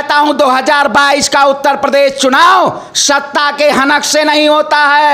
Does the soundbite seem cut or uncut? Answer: uncut